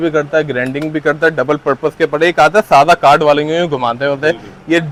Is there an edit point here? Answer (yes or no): no